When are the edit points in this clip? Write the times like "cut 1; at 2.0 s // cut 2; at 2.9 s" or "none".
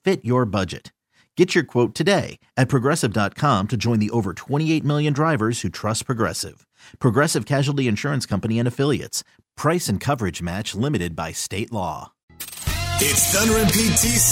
cut 1; at 12.4 s